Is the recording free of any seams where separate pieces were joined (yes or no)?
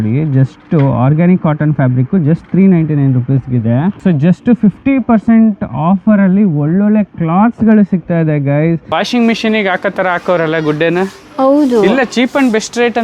no